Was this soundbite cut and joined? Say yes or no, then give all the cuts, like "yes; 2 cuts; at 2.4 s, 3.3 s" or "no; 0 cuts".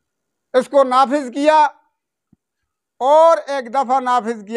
no; 0 cuts